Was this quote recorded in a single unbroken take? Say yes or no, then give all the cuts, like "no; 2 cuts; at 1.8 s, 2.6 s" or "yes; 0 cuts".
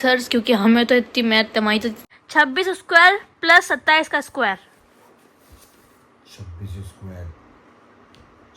no; 1 cut; at 2.0 s